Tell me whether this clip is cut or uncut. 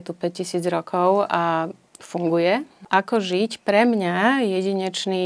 cut